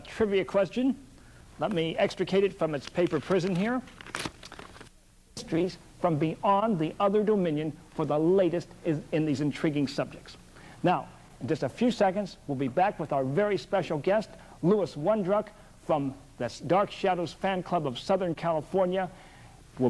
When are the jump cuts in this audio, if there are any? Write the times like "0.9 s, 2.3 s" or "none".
16.6 s